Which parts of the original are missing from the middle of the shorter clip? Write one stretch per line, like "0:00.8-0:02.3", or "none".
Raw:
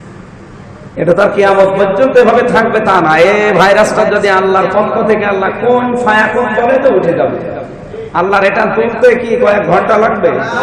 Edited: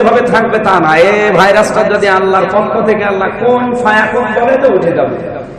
none